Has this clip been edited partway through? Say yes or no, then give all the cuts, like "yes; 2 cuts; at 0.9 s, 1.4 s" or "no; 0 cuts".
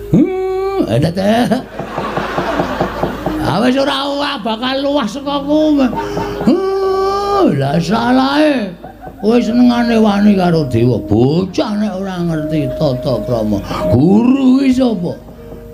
no; 0 cuts